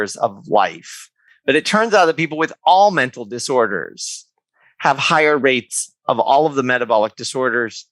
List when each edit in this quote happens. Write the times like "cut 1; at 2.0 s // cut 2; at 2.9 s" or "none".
cut 1; at 1.3 s